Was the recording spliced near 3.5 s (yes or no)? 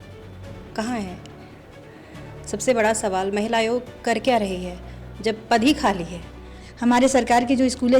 no